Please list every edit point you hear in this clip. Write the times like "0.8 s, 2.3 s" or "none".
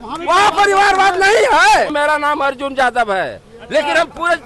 1.9 s